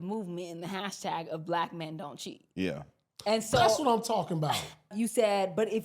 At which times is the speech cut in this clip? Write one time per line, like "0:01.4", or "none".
0:04.9